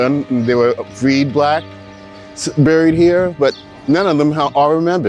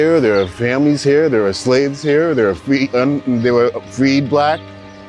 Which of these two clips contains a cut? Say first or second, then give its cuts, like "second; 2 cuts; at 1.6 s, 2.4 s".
first; 1 cut; at 3.7 s